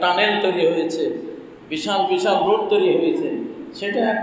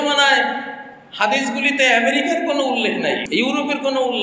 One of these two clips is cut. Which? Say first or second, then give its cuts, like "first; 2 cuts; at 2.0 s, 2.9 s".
second; 1 cut; at 3.2 s